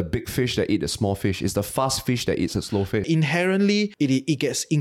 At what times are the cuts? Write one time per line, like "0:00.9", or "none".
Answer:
0:03.0
0:03.9